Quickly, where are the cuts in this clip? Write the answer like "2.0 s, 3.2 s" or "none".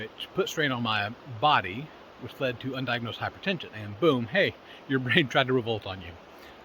3.8 s